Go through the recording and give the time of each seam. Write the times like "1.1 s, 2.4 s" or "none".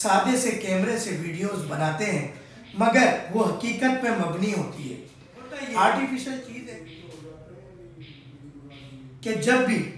6.5 s